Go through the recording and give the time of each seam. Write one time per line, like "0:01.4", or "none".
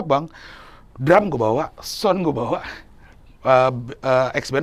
none